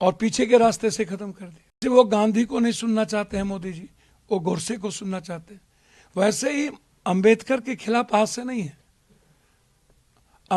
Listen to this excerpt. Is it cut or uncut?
cut